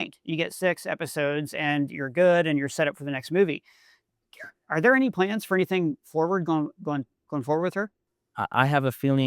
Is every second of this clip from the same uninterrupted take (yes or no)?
no